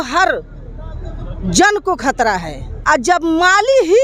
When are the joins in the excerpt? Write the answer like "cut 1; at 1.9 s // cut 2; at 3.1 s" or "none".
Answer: cut 1; at 2.7 s